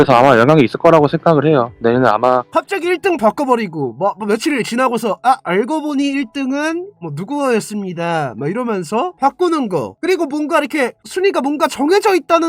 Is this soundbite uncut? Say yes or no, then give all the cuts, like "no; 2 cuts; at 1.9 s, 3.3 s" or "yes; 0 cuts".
no; 1 cut; at 2.5 s